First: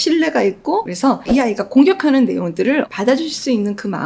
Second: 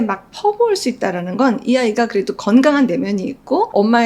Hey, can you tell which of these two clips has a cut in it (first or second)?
first